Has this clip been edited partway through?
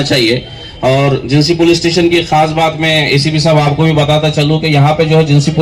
no; 0 cuts

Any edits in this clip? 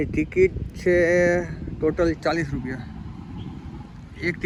no; 0 cuts

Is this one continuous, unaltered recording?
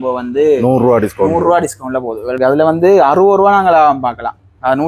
no; 1 cut; at 2.3 s

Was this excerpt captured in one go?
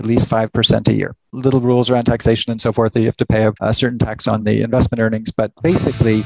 yes; 0 cuts

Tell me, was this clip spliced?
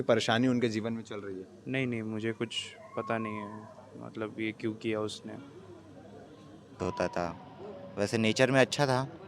yes; 1 cut; at 6.8 s

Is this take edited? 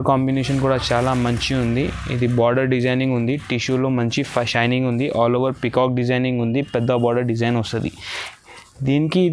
no; 0 cuts

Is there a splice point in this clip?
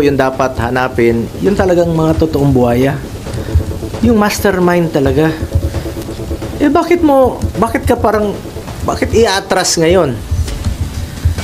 no; 0 cuts

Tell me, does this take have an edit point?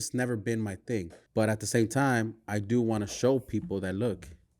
yes; 1 cut; at 1.2 s

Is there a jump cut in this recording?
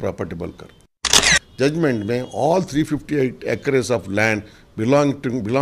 yes; 1 cut; at 1.2 s

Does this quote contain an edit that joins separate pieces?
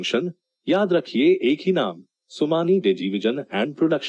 no; 0 cuts

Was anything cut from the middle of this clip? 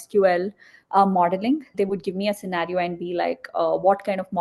yes; 1 cut; at 1.7 s

